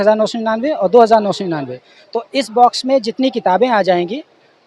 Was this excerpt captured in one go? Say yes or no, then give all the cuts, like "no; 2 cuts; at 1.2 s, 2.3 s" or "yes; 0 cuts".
yes; 0 cuts